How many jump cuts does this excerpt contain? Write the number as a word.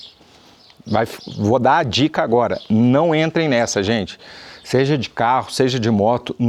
zero